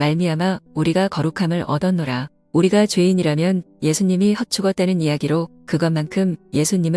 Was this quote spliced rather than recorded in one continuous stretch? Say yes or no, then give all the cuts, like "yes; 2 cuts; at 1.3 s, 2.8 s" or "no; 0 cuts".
yes; 1 cut; at 2.4 s